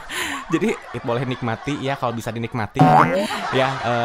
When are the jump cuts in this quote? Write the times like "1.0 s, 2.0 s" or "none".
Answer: 1.0 s